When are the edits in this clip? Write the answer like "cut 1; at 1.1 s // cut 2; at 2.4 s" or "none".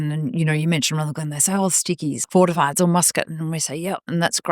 cut 1; at 2.2 s